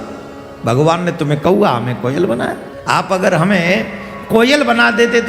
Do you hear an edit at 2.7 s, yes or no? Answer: yes